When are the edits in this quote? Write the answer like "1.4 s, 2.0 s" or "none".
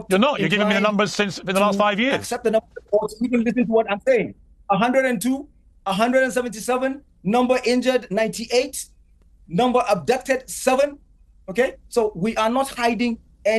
none